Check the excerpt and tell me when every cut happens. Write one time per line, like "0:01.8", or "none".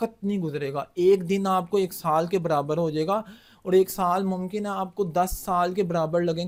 none